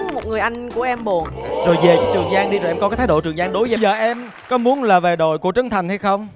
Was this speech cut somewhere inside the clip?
yes; 1 cut; at 3.8 s

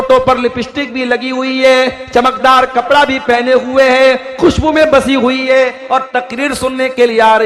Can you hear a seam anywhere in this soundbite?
no; 0 cuts

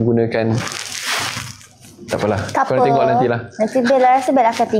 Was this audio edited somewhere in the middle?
no; 0 cuts

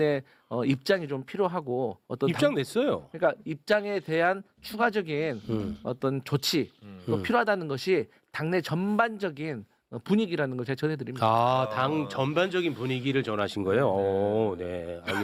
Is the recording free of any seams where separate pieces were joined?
yes; 0 cuts

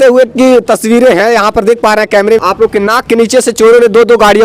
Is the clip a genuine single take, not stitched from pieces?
no; 1 cut; at 2.4 s

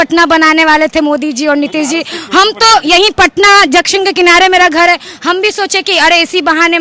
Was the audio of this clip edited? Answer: no; 0 cuts

